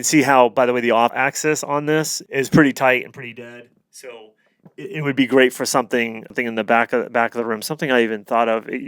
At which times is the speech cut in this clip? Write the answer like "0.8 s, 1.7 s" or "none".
1.1 s, 2.2 s, 6.3 s